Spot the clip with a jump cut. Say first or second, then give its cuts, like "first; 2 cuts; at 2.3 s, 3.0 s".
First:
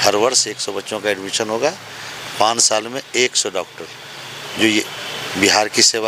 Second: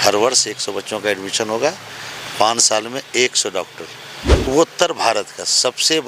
second; 1 cut; at 4.5 s